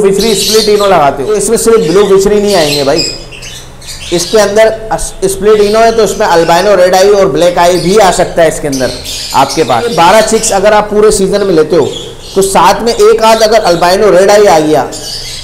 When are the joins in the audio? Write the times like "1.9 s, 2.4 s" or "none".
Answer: 1.3 s, 9.9 s